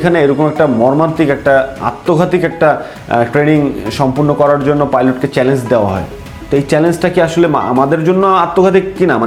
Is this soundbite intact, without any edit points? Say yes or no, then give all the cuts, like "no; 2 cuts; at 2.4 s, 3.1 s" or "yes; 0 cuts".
yes; 0 cuts